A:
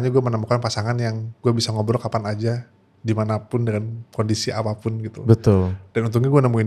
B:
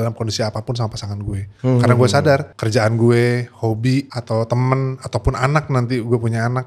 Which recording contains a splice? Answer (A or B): B